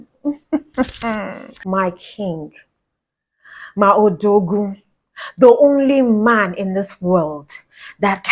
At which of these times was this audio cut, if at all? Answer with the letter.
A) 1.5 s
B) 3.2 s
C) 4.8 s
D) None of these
A